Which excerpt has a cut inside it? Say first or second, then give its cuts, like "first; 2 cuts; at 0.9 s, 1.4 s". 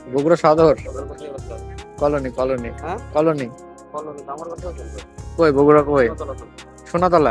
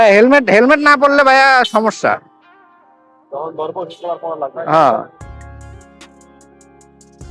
second; 1 cut; at 5.1 s